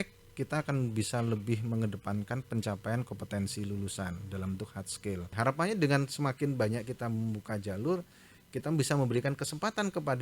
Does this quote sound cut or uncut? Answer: cut